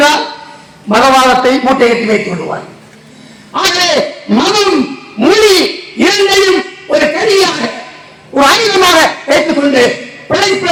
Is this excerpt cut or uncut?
uncut